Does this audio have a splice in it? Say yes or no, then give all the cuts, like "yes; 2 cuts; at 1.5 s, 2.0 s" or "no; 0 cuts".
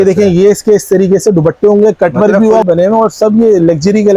yes; 1 cut; at 2.6 s